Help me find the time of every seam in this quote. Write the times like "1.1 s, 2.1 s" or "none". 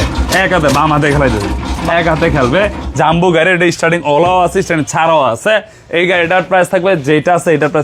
none